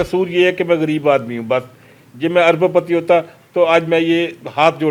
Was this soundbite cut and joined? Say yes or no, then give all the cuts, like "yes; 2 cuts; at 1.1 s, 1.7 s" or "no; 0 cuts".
no; 0 cuts